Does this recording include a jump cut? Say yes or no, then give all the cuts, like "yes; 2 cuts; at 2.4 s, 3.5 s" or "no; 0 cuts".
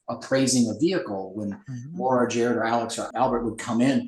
yes; 1 cut; at 3.1 s